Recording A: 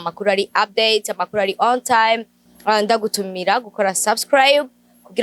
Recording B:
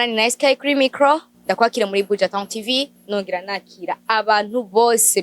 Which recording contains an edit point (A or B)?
B